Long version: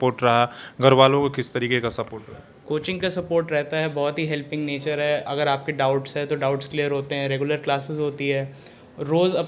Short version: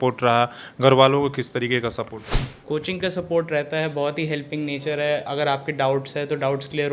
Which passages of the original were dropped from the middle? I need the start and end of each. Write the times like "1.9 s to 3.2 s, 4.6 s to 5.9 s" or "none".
none